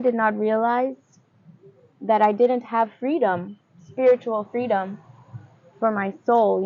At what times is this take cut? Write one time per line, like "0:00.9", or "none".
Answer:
none